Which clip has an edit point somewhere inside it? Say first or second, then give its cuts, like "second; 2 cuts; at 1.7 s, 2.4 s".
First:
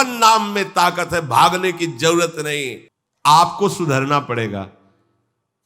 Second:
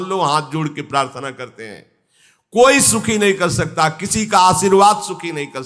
first; 1 cut; at 2.7 s